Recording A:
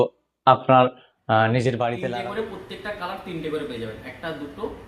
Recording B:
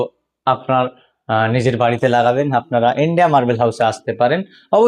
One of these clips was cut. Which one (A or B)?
A